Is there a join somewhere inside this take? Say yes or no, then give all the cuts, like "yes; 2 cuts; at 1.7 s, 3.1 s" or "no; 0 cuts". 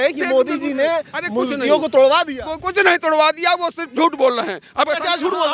no; 0 cuts